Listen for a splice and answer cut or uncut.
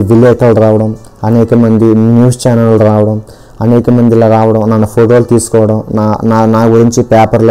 uncut